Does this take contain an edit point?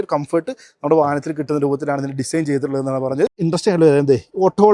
yes; 1 cut; at 3.4 s

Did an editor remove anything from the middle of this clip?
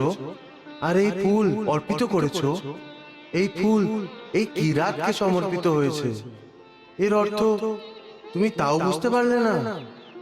no; 0 cuts

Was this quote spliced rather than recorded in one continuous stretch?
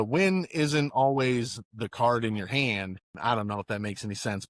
yes; 1 cut; at 3.0 s

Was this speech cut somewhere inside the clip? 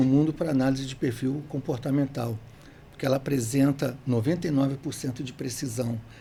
no; 0 cuts

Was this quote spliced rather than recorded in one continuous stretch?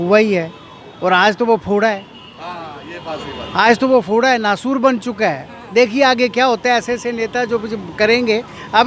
no; 0 cuts

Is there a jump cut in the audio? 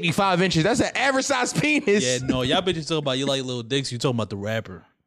no; 0 cuts

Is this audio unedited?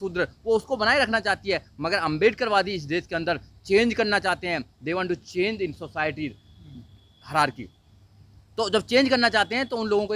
yes; 0 cuts

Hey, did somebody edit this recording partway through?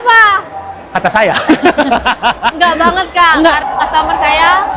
yes; 1 cut; at 3.7 s

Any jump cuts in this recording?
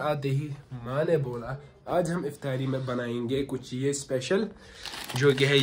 no; 0 cuts

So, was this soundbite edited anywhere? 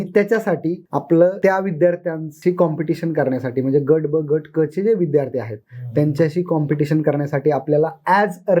yes; 3 cuts; at 0.9 s, 1.4 s, 2.2 s

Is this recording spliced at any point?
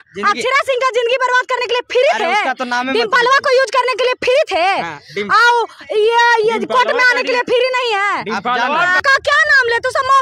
yes; 1 cut; at 9.0 s

